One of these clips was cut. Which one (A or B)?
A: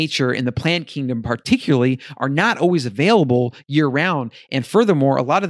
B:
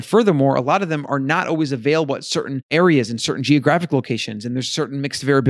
B